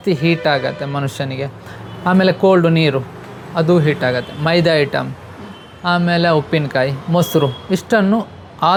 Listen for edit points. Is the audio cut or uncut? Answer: uncut